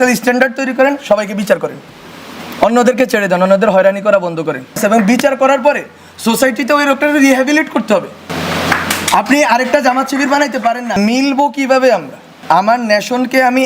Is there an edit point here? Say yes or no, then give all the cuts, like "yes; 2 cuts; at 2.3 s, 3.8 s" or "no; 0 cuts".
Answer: yes; 4 cuts; at 4.8 s, 8.3 s, 10.9 s, 12.4 s